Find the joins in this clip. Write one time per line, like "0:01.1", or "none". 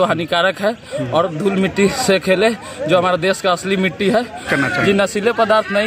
0:04.4